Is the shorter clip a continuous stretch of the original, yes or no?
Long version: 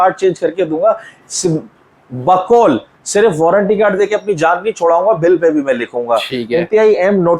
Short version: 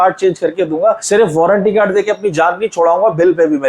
no